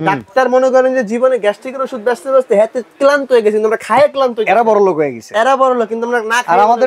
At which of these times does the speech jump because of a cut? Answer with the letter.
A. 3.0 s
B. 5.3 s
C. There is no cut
C